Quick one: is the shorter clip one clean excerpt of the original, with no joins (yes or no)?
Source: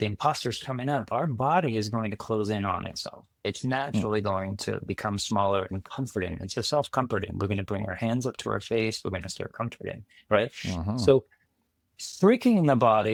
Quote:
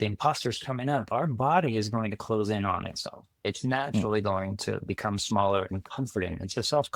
yes